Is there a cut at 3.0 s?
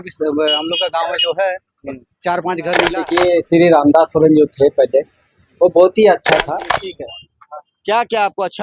yes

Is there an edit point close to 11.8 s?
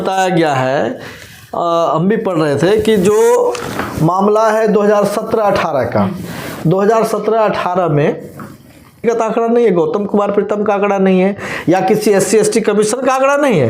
no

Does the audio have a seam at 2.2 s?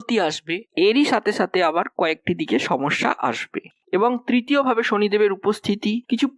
no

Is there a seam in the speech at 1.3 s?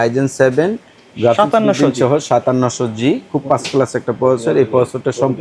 no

